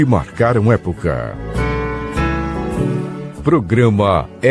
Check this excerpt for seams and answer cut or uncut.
cut